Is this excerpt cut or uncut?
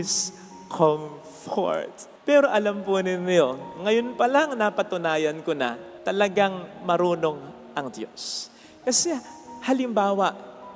uncut